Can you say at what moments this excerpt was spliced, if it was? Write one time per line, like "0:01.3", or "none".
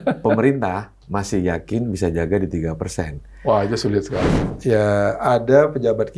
0:04.2